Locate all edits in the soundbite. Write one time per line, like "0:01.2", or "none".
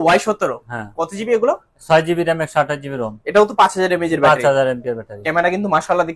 none